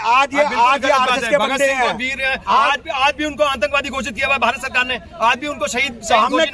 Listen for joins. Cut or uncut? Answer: uncut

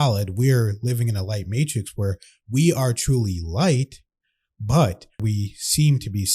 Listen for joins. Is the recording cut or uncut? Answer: cut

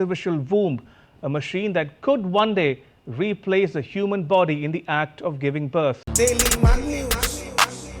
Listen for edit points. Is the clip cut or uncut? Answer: cut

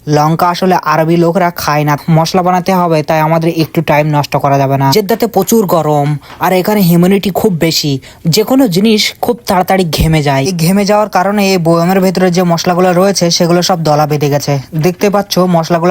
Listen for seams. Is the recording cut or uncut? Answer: cut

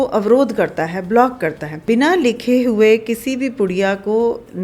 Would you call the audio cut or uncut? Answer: cut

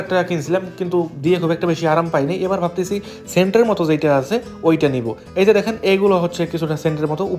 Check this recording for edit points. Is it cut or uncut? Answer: uncut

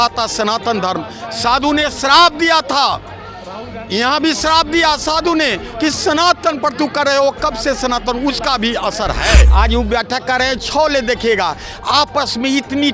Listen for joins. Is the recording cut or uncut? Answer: cut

